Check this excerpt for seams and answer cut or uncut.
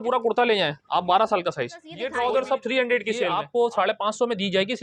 cut